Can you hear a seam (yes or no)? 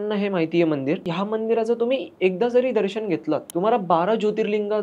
yes